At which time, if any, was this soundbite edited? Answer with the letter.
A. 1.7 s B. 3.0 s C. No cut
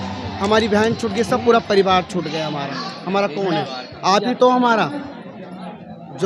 C